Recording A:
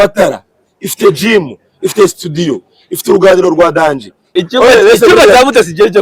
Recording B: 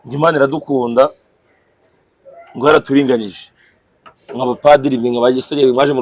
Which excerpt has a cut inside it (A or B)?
A